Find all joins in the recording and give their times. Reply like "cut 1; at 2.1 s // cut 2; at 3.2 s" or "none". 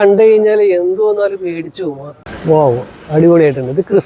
cut 1; at 2.2 s